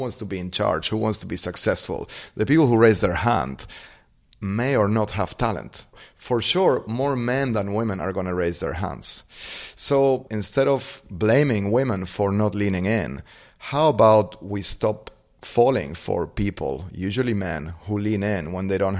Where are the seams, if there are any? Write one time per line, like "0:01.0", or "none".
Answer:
0:06.0
0:10.4